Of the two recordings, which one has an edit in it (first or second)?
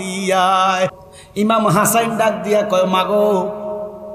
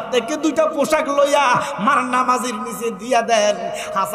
first